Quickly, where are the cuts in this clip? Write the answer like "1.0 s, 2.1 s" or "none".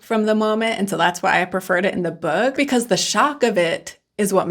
2.6 s

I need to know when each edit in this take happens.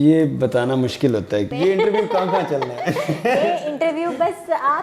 1.5 s

